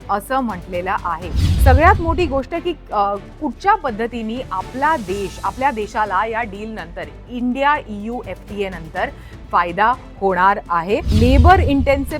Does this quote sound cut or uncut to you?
cut